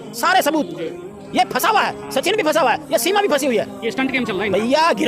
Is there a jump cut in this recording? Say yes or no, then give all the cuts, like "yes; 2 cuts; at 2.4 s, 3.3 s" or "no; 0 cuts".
yes; 1 cut; at 1.0 s